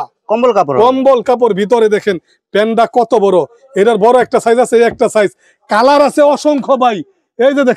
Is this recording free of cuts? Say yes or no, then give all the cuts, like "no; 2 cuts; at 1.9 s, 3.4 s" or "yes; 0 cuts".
yes; 0 cuts